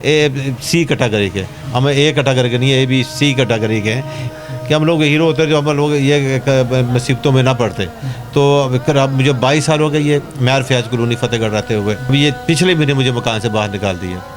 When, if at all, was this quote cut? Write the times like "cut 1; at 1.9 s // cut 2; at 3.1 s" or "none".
cut 1; at 4.3 s // cut 2; at 12.1 s